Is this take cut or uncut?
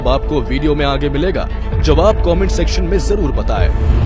uncut